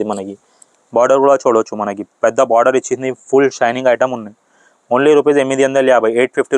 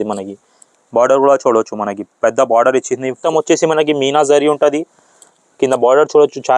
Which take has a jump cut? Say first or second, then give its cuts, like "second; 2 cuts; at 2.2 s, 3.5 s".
second; 1 cut; at 3.2 s